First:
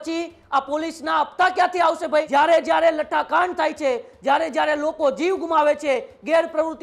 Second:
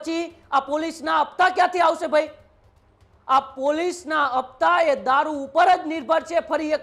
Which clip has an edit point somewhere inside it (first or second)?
first